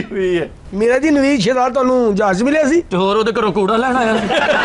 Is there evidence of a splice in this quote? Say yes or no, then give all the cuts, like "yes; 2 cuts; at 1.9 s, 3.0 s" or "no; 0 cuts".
no; 0 cuts